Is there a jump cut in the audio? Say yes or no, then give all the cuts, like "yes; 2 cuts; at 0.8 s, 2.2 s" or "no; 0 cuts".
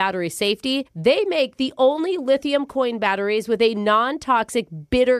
no; 0 cuts